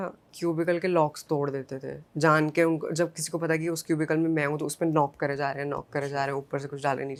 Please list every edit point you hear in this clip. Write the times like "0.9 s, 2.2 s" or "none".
none